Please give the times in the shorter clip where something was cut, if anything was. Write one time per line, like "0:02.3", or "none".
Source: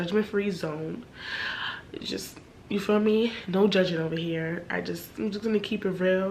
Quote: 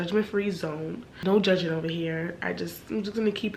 0:01.1